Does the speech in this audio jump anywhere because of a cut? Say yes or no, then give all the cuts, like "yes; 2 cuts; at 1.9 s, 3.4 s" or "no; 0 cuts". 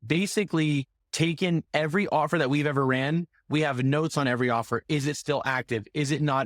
yes; 1 cut; at 1.0 s